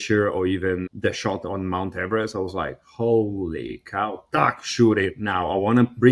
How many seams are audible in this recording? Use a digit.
1